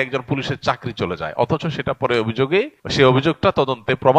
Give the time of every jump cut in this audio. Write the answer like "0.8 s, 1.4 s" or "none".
2.8 s